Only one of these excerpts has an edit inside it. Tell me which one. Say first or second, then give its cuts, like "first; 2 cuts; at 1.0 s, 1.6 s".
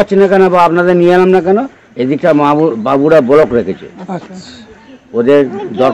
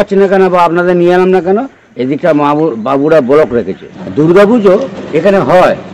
second; 1 cut; at 4.3 s